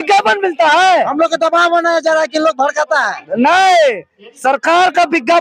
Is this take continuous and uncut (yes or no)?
yes